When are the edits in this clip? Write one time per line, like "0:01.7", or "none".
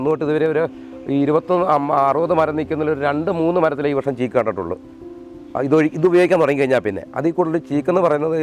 none